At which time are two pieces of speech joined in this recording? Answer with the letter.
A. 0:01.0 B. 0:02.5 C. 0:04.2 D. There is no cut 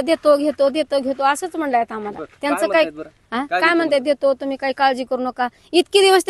D